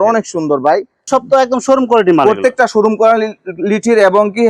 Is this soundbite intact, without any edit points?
no; 1 cut; at 1.1 s

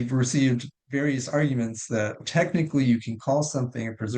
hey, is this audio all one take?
no; 1 cut; at 2.2 s

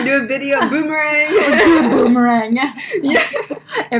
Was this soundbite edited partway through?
no; 0 cuts

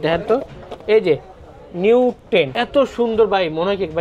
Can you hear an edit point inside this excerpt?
yes; 1 cut; at 2.5 s

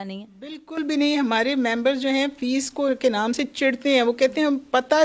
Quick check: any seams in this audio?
no; 0 cuts

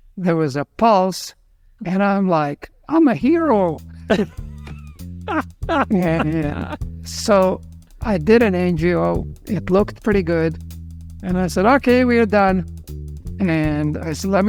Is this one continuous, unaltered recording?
yes; 0 cuts

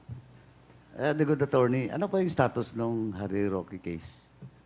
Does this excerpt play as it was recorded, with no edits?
yes; 0 cuts

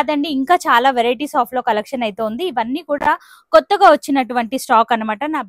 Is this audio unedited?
yes; 0 cuts

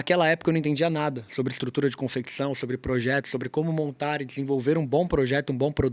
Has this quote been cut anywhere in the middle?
no; 0 cuts

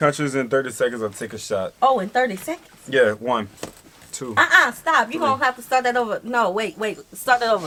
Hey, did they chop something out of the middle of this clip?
no; 0 cuts

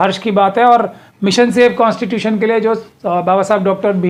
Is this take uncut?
yes; 0 cuts

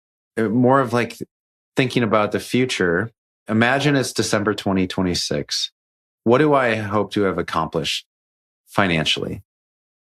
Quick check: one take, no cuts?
no; 2 cuts; at 3.4 s, 6.1 s

